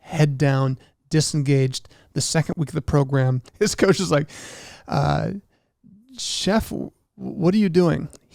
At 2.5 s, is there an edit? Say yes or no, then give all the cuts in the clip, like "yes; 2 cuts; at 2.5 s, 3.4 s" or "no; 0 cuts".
yes; 2 cuts; at 2.5 s, 3.5 s